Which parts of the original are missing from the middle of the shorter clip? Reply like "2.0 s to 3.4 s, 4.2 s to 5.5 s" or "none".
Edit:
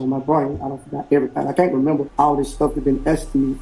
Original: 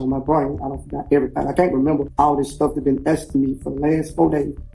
none